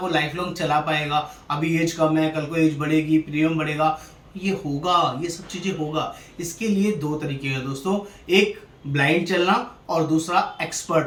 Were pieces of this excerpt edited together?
no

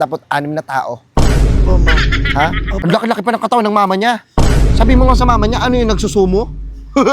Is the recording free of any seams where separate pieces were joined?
no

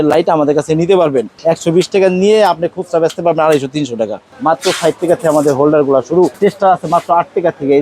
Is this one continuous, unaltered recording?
no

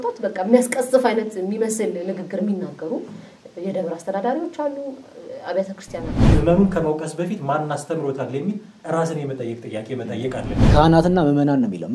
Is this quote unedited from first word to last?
no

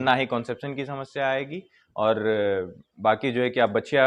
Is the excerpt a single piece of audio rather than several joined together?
yes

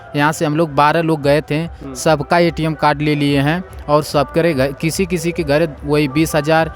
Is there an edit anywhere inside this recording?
no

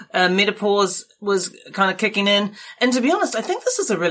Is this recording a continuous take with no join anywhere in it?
yes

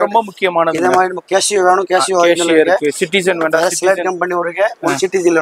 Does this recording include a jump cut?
no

